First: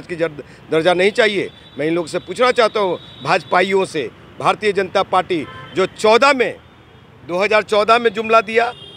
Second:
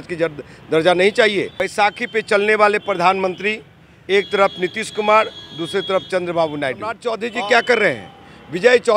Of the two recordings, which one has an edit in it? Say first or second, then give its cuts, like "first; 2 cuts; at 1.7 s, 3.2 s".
second; 2 cuts; at 1.6 s, 7.1 s